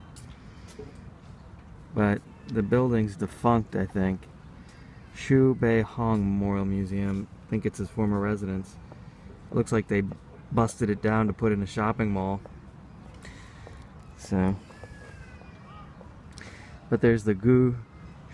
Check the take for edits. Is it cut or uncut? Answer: cut